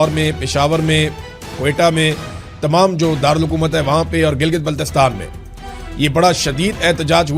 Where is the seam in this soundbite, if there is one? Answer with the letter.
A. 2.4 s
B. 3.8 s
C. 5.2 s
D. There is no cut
D